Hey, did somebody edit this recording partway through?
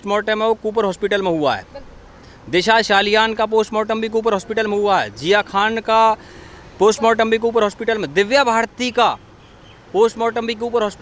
no; 0 cuts

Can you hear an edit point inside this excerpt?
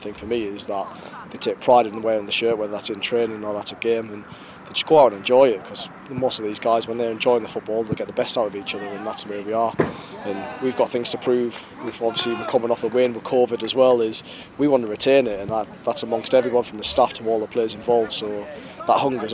no; 0 cuts

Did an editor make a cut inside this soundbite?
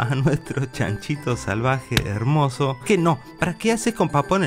yes; 1 cut; at 2.8 s

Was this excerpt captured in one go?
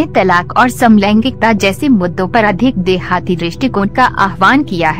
no; 1 cut; at 4.1 s

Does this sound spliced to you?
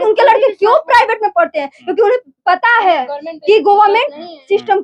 no; 0 cuts

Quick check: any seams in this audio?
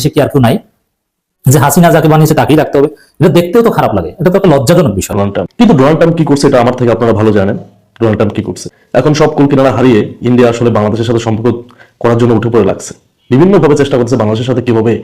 yes; 1 cut; at 5.1 s

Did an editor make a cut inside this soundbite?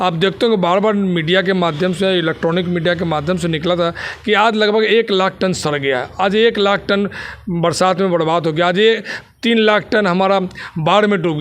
no; 0 cuts

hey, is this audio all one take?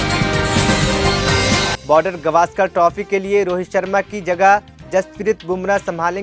no; 1 cut; at 1.8 s

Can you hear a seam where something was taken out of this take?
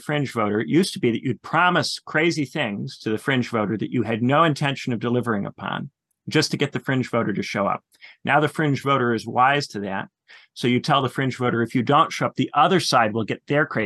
no; 0 cuts

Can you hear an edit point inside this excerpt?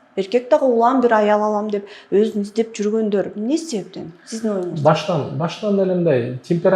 no; 0 cuts

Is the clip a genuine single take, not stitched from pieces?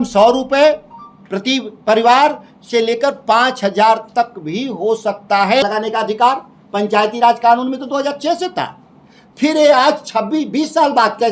no; 1 cut; at 5.6 s

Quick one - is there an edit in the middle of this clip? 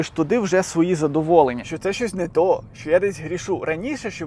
yes; 1 cut; at 1.7 s

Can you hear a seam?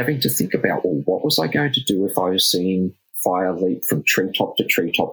no; 0 cuts

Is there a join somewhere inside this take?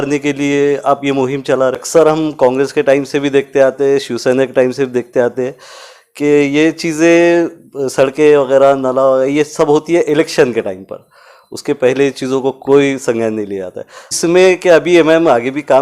yes; 2 cuts; at 1.8 s, 14.1 s

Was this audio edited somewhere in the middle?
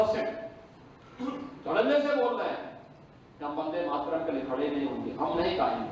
no; 0 cuts

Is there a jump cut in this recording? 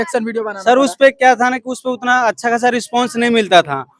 no; 0 cuts

